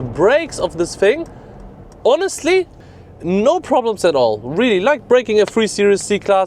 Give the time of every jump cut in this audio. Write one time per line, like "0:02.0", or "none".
0:02.8